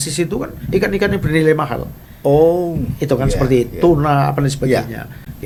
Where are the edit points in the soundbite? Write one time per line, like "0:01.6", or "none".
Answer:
none